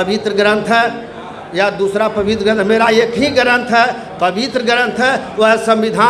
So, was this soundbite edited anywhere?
no; 0 cuts

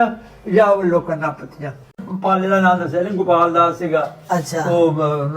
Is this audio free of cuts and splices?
no; 1 cut; at 1.8 s

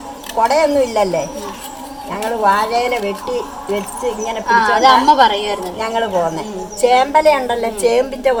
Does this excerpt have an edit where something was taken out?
no; 0 cuts

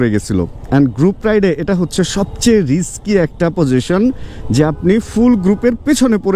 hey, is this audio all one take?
yes; 0 cuts

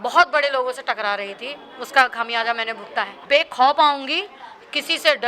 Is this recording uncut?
no; 1 cut; at 3.2 s

